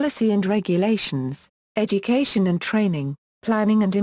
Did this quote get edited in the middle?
yes; 1 cut; at 1.1 s

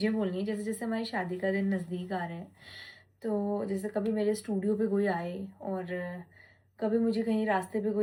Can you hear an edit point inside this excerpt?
no; 0 cuts

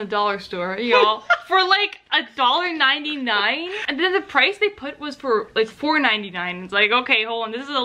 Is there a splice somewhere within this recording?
yes; 1 cut; at 3.8 s

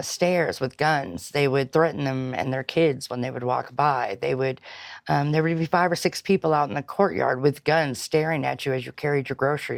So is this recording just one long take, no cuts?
yes; 0 cuts

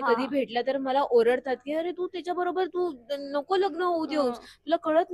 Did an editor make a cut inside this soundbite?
no; 0 cuts

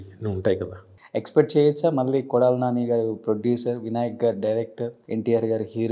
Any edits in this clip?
yes; 2 cuts; at 1.0 s, 5.0 s

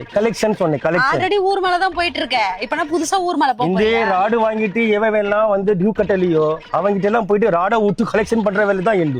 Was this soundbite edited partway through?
no; 0 cuts

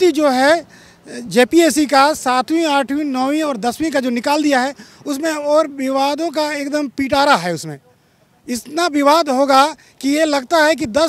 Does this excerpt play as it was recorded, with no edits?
yes; 0 cuts

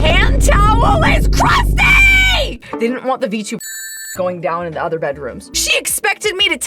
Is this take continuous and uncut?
no; 2 cuts; at 2.6 s, 5.6 s

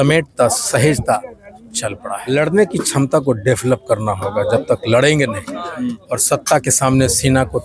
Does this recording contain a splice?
yes; 1 cut; at 2.1 s

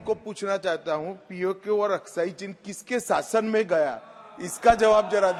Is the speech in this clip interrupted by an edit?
no; 0 cuts

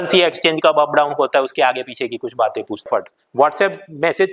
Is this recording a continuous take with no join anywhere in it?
no; 1 cut; at 2.9 s

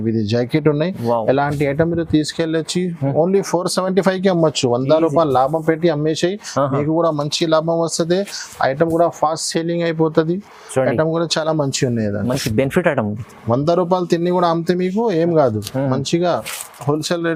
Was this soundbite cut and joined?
no; 0 cuts

